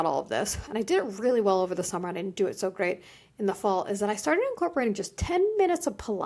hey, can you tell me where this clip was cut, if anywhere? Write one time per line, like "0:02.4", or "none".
none